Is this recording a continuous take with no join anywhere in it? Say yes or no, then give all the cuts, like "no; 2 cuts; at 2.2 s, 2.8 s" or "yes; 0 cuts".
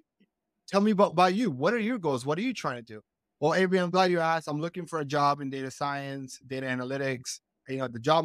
yes; 0 cuts